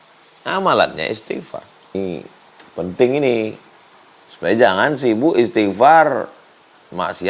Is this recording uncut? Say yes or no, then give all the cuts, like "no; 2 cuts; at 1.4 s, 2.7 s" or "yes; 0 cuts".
no; 1 cut; at 1.9 s